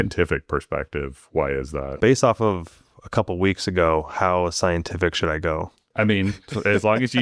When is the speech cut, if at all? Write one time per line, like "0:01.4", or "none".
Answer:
0:01.9
0:05.8